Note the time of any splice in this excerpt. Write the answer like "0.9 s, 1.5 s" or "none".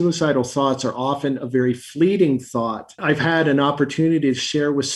2.9 s